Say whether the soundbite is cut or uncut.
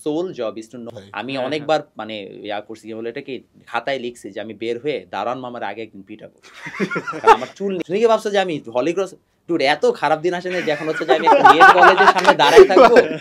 cut